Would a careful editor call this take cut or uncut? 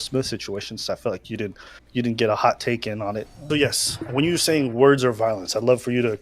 cut